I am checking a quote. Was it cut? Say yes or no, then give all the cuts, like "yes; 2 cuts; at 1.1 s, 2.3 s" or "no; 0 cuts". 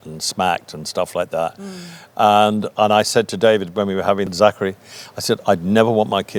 no; 0 cuts